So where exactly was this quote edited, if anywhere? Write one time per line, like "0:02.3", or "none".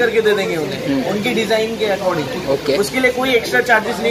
none